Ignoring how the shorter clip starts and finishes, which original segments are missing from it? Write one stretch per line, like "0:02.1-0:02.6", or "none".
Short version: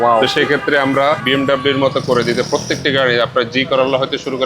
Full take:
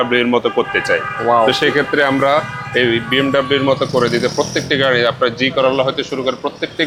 0:02.5-0:03.1